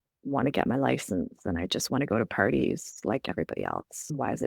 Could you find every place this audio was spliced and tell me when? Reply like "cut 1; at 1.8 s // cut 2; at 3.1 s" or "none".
none